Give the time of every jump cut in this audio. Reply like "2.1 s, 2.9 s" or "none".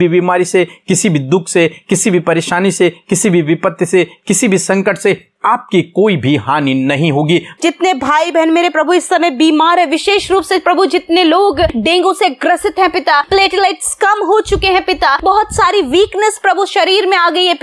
7.6 s, 11.7 s, 13.3 s, 15.2 s